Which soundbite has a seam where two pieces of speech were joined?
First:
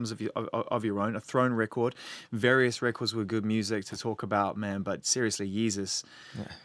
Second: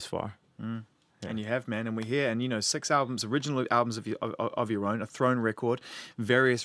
second; 1 cut; at 1.1 s

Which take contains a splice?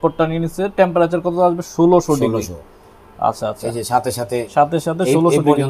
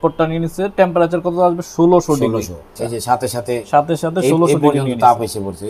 second; 1 cut; at 2.8 s

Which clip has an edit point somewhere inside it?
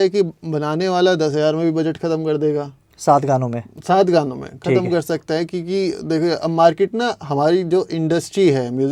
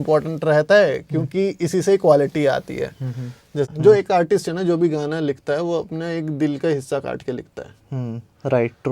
second; 1 cut; at 3.7 s

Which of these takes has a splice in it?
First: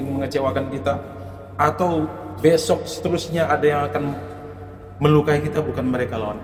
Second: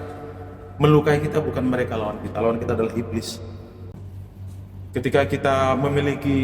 second; 1 cut; at 3.9 s

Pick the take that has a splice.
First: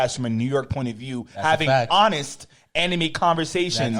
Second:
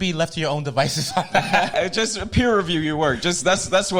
second; 1 cut; at 1.7 s

